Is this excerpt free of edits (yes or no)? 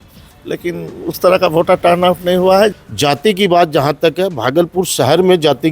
no